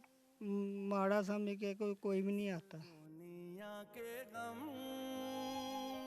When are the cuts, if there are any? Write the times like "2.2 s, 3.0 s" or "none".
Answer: 3.0 s